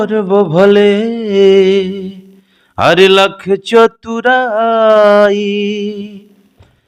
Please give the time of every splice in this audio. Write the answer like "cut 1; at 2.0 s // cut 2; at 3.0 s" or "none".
none